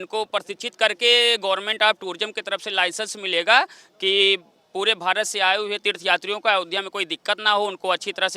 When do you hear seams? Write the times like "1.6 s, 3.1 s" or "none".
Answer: none